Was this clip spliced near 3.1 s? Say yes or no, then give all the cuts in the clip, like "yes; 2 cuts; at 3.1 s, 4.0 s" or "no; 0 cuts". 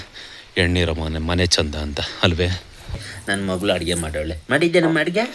yes; 1 cut; at 3.1 s